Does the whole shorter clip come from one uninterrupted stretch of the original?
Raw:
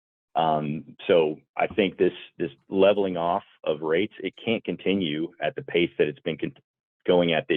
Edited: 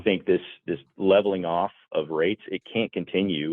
yes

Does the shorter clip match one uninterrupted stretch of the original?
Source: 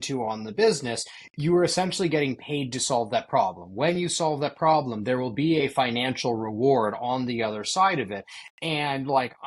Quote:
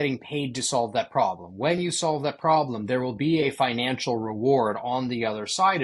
yes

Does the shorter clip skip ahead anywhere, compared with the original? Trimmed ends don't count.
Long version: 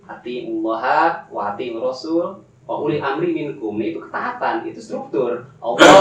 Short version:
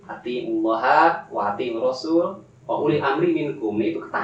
no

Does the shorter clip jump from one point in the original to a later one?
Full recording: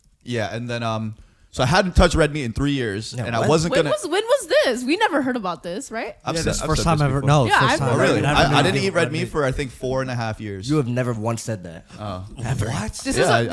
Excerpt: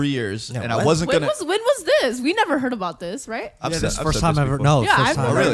no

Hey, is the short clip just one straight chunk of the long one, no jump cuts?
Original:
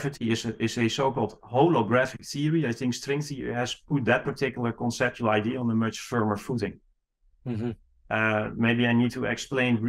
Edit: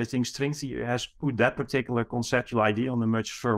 yes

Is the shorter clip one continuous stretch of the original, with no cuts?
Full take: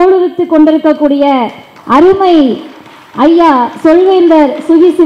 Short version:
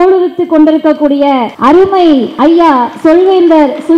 no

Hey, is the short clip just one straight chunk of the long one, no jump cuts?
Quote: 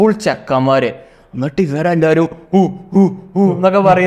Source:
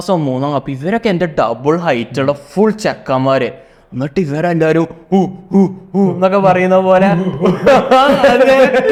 yes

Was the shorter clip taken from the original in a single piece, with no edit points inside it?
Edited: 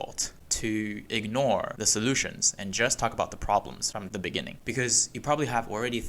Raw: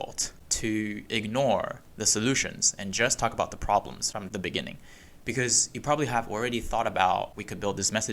no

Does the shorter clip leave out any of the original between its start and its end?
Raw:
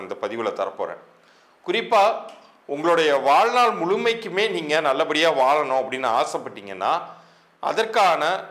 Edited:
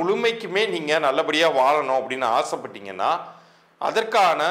no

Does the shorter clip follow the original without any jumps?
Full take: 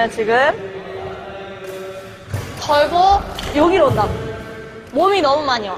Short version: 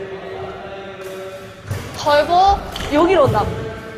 yes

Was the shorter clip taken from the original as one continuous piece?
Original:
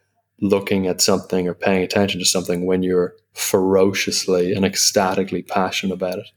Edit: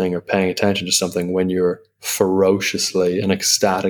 yes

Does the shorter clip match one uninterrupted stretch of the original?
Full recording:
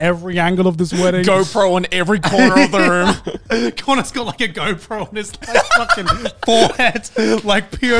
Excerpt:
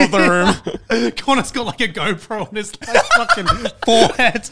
yes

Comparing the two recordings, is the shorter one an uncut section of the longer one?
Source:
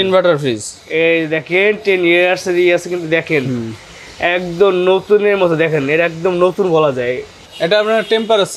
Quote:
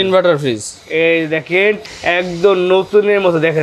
no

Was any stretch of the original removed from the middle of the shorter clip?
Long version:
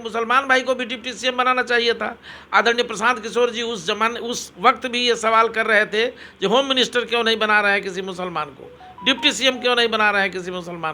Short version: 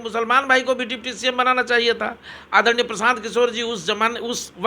no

